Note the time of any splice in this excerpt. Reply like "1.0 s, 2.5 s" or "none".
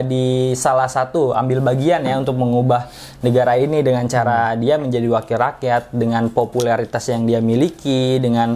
none